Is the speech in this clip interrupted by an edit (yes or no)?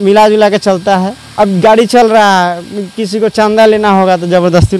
yes